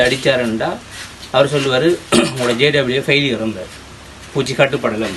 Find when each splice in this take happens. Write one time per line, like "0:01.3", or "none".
none